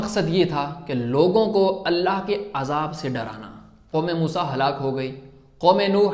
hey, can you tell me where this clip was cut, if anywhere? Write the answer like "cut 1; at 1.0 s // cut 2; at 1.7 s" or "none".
cut 1; at 3.9 s